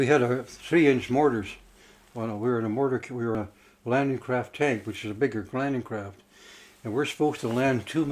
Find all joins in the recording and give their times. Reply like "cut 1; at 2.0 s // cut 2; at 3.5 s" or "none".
cut 1; at 3.4 s